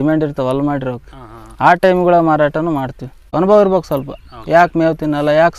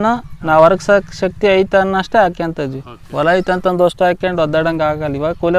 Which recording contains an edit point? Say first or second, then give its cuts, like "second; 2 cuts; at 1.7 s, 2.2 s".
first; 1 cut; at 3.3 s